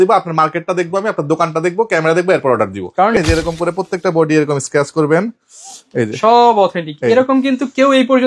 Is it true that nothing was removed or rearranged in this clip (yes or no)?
no